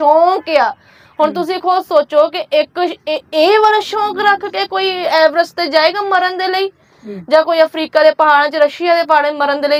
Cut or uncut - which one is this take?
uncut